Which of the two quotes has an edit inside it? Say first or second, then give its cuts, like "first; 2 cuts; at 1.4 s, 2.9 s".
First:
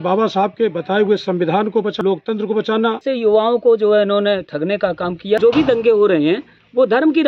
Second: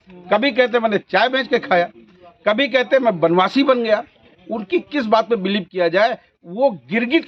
first; 3 cuts; at 2.0 s, 3.0 s, 5.4 s